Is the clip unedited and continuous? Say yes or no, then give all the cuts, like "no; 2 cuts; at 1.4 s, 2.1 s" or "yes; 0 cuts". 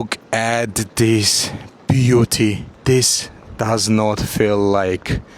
no; 1 cut; at 2.7 s